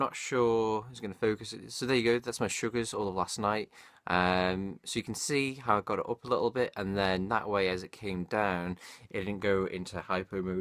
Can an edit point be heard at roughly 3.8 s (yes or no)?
no